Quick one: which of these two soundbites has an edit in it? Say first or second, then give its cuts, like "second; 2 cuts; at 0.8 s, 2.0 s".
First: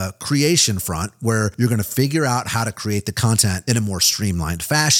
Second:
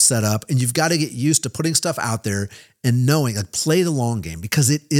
first; 2 cuts; at 1.5 s, 3.6 s